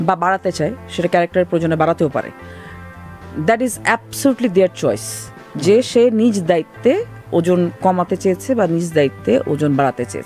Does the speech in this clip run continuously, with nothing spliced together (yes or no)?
yes